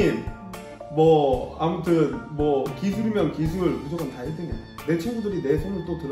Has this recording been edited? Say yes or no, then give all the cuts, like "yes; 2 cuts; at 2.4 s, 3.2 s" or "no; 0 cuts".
no; 0 cuts